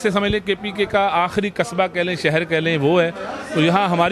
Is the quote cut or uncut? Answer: uncut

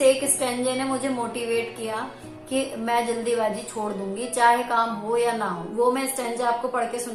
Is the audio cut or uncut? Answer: uncut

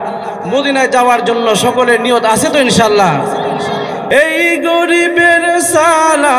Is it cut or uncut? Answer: cut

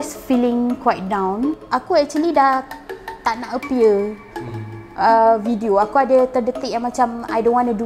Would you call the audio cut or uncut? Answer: cut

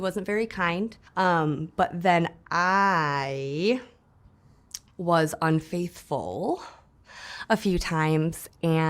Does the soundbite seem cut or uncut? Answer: cut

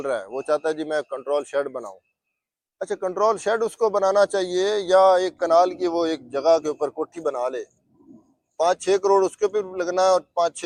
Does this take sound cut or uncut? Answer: uncut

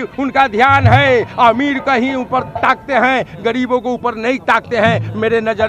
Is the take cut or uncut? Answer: uncut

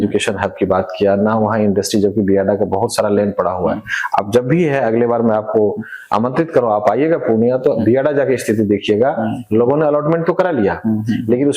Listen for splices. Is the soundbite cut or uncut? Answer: uncut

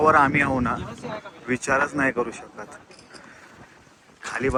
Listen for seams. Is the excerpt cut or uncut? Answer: uncut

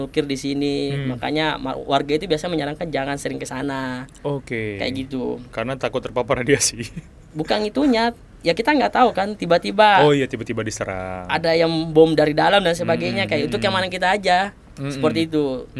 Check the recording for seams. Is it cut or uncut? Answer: uncut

